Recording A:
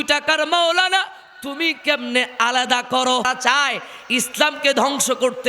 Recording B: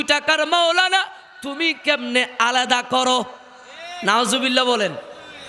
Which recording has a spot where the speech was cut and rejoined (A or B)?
A